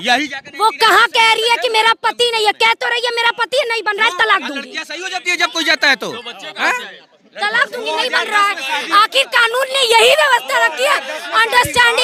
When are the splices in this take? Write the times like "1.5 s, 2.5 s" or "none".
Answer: none